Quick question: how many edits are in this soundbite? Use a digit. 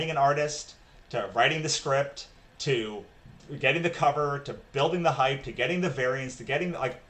0